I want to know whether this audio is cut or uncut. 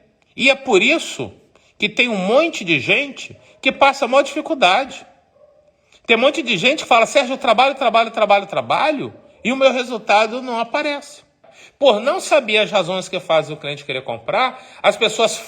cut